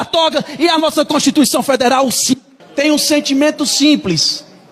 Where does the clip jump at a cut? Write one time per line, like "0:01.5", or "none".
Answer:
0:02.6